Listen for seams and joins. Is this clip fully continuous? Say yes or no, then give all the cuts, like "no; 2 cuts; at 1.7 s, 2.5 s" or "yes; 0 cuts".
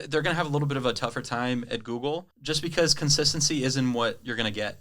no; 1 cut; at 2.3 s